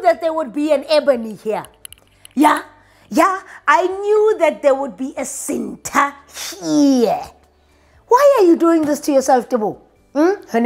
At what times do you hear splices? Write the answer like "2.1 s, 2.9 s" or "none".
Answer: none